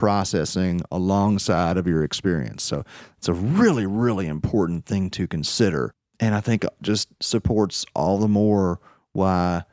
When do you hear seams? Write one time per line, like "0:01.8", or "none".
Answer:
0:06.0